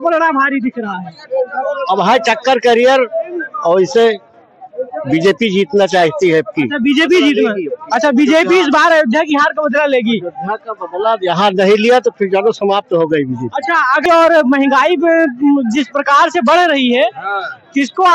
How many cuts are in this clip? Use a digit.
1